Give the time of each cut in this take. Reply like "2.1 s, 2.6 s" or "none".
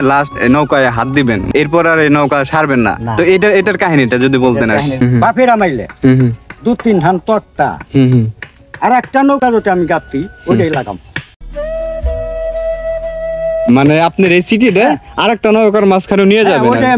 5.0 s